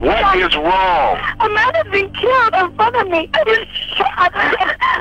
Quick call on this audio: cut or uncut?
uncut